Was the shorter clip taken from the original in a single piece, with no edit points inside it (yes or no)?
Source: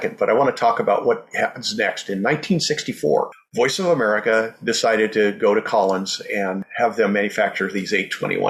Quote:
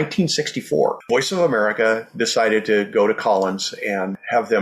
no